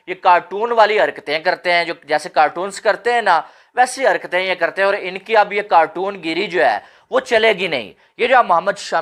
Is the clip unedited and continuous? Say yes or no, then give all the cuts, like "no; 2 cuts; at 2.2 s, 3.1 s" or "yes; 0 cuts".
yes; 0 cuts